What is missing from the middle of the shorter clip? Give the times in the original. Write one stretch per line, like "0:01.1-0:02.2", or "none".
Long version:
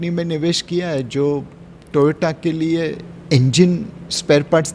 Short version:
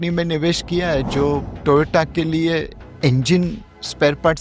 0:01.5-0:01.8